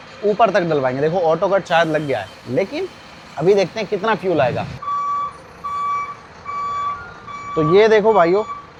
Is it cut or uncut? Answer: uncut